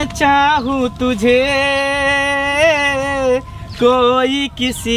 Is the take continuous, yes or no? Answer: yes